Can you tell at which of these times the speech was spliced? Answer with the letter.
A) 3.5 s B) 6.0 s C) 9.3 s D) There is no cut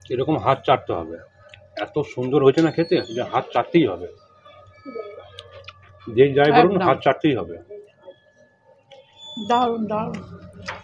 C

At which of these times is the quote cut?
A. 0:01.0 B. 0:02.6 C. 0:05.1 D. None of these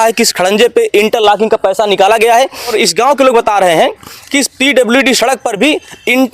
B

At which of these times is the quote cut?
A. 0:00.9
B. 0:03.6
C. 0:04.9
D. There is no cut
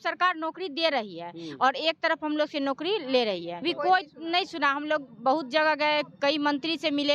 B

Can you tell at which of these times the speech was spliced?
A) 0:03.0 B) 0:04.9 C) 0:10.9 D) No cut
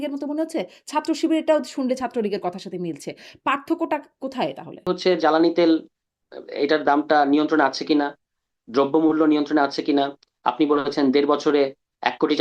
B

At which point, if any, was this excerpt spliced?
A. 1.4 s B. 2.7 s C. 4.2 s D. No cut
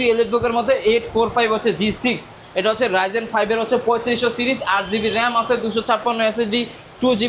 D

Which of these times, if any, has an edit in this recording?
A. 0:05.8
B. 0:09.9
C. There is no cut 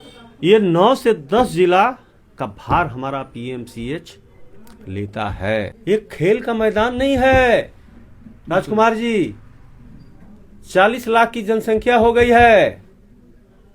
A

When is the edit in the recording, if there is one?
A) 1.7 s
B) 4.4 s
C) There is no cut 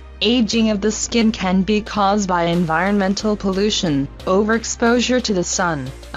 B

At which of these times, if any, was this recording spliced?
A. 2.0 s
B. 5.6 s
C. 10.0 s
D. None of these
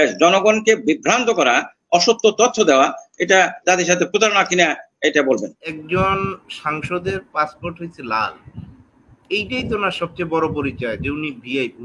B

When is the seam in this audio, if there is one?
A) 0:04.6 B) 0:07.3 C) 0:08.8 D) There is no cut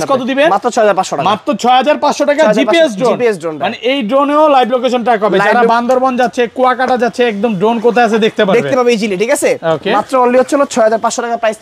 D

